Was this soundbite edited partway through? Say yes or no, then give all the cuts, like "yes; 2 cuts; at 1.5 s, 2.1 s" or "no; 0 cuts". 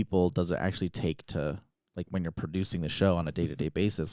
no; 0 cuts